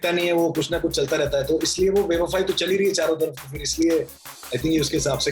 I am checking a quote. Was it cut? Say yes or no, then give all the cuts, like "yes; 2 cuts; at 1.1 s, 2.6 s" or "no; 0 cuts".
no; 0 cuts